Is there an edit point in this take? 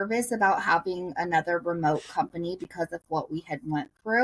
no; 0 cuts

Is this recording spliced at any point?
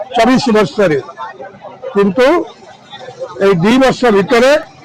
no; 0 cuts

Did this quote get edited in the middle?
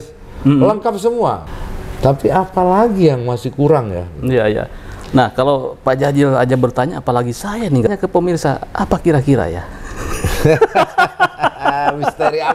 yes; 2 cuts; at 1.4 s, 7.9 s

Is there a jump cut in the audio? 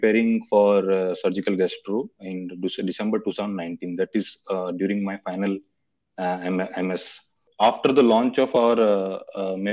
yes; 1 cut; at 7.4 s

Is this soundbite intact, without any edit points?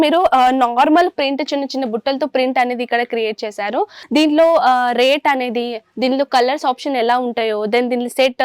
no; 1 cut; at 4.0 s

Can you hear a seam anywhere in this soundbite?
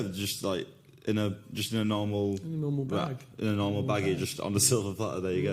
no; 0 cuts

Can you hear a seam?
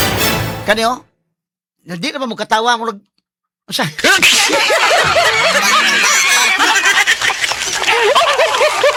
no; 0 cuts

